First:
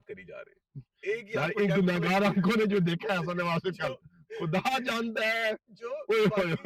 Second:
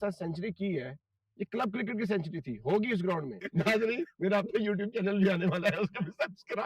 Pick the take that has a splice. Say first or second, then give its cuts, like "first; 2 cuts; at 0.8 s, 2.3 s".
second; 1 cut; at 3.4 s